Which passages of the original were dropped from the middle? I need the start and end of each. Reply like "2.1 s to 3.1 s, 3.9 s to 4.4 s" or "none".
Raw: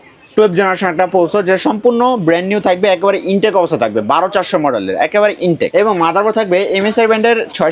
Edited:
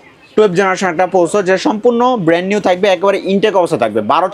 none

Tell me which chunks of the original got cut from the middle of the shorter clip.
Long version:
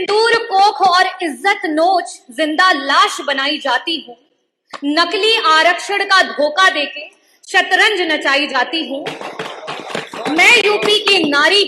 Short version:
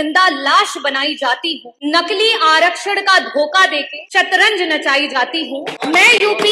4.1 s to 4.7 s, 7.0 s to 7.4 s, 9.1 s to 10.2 s

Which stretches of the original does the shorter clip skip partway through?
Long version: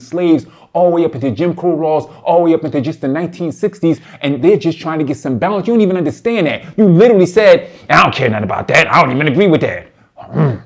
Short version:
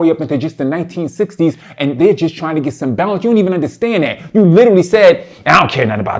none

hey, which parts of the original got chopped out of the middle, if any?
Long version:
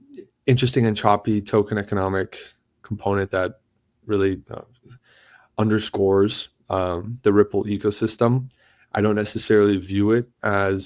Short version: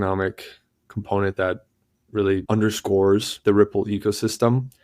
4.4 s to 5.5 s, 6.4 s to 7.1 s

